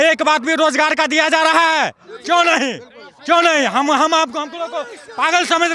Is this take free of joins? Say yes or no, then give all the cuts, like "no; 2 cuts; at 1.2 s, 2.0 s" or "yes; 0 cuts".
yes; 0 cuts